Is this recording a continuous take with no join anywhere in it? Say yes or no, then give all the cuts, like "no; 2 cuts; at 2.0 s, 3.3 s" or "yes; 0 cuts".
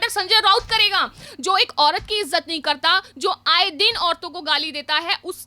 no; 1 cut; at 1.3 s